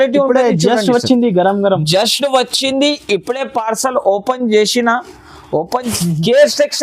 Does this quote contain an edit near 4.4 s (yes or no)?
no